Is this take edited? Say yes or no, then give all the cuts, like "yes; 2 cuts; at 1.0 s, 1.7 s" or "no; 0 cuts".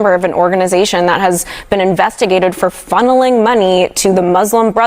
no; 0 cuts